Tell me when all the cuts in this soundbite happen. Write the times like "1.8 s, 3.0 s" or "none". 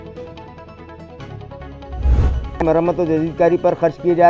2.2 s